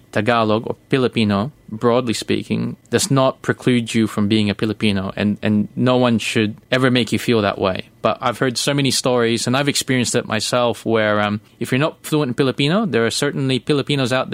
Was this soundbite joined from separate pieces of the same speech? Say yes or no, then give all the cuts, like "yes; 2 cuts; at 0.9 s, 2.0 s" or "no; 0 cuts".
yes; 3 cuts; at 2.8 s, 6.6 s, 11.5 s